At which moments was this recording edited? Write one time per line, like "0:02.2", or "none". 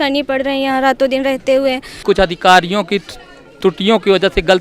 0:01.9